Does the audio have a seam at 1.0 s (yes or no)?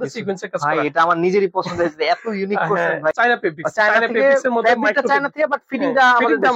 no